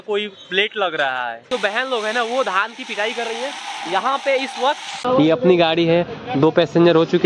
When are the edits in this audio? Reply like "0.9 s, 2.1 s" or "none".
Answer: 1.5 s, 5.0 s